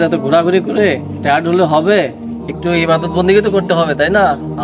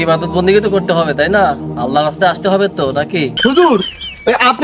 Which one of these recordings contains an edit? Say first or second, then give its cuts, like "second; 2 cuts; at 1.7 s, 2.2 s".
second; 1 cut; at 3.3 s